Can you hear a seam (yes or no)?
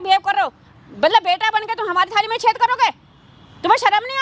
no